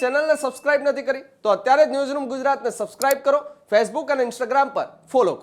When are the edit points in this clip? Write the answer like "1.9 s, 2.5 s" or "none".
none

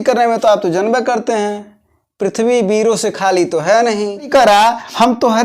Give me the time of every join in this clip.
4.3 s

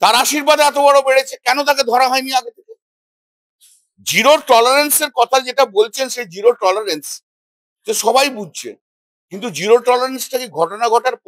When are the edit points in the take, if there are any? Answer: none

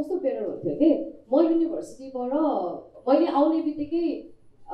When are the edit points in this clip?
none

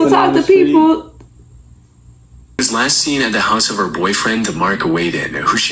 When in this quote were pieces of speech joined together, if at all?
2.6 s

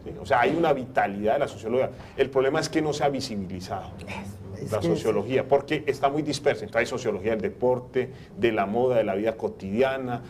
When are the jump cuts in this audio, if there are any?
none

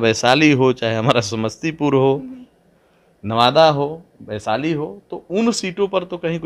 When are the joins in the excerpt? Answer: none

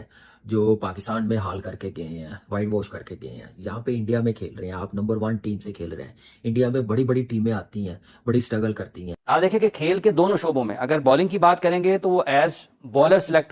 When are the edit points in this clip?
9.1 s

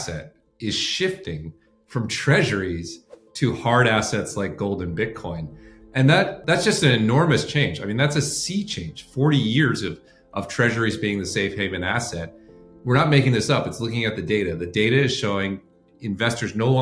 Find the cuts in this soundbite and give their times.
none

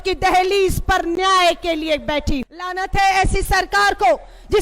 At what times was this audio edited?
2.6 s

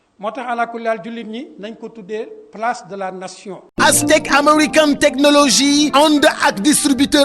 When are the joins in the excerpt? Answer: 3.6 s

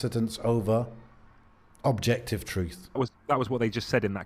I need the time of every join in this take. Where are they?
3.0 s

